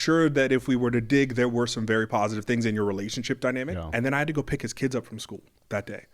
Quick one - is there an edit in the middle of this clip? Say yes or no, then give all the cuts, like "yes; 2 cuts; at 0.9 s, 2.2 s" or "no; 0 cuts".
yes; 1 cut; at 3.6 s